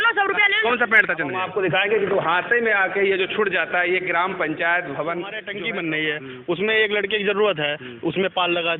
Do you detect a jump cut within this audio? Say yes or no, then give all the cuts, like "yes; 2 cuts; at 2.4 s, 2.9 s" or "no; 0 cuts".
yes; 2 cuts; at 1.4 s, 5.5 s